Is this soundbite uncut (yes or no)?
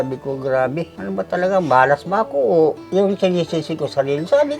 no